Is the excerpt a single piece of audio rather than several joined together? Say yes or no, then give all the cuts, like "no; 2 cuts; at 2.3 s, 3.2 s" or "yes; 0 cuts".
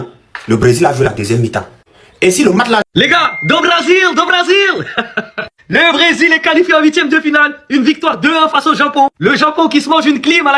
no; 1 cut; at 2.8 s